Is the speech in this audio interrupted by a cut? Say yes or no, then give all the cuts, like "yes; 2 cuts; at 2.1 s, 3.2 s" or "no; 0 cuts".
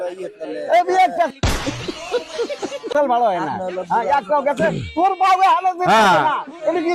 no; 0 cuts